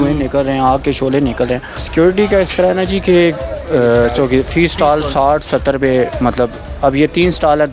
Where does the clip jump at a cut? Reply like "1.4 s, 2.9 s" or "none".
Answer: 1.7 s